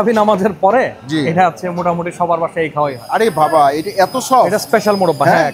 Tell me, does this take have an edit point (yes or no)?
yes